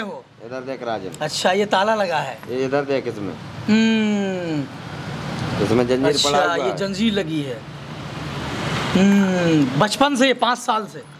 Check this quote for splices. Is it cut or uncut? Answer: uncut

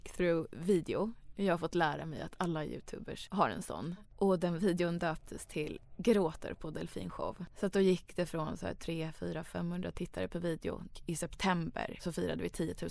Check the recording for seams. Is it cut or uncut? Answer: cut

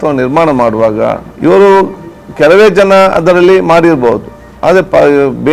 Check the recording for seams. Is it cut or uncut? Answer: cut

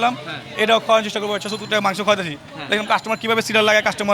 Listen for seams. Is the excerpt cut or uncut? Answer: uncut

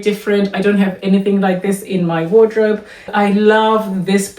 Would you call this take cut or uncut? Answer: cut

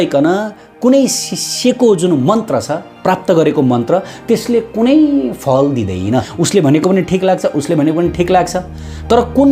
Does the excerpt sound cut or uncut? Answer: cut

